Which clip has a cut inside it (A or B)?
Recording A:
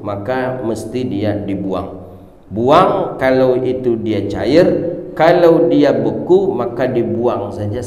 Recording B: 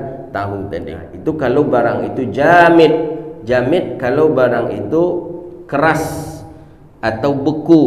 B